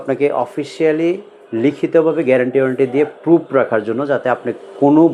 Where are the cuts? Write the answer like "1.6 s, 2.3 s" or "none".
none

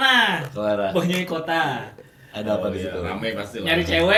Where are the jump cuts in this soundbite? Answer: none

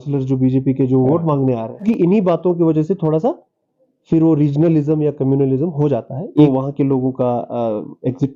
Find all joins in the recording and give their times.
1.8 s, 6.5 s

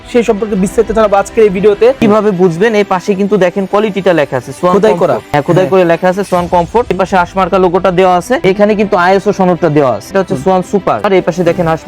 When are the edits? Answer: 2.0 s, 5.3 s, 7.0 s, 8.4 s, 10.1 s, 11.0 s

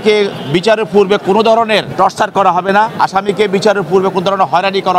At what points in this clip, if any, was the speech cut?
1.9 s, 2.9 s

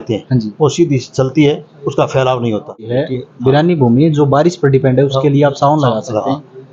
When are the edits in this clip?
2.9 s

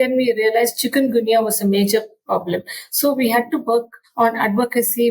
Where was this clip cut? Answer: 4.0 s

